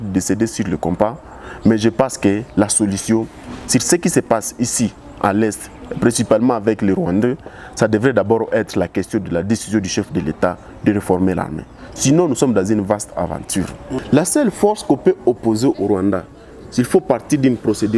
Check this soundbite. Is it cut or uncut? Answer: cut